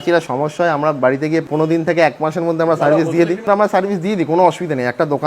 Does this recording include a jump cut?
yes; 2 cuts; at 1.5 s, 3.4 s

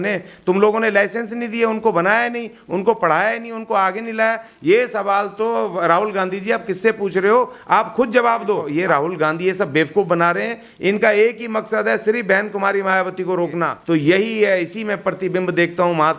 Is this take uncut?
no; 2 cuts; at 8.7 s, 13.8 s

